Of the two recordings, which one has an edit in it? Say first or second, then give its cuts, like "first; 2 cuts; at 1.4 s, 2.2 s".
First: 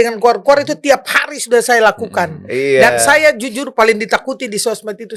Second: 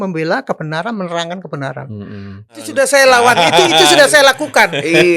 second; 1 cut; at 2.7 s